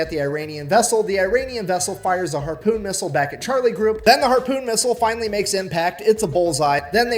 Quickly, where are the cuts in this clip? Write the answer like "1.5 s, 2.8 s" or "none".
4.0 s